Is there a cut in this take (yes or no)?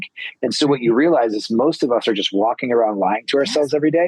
no